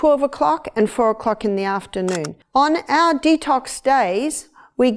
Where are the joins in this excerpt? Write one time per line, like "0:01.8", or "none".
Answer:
0:02.4